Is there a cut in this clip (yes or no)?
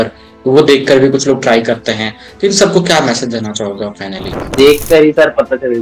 yes